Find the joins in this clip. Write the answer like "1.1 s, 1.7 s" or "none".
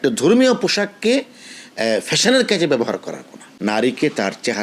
3.4 s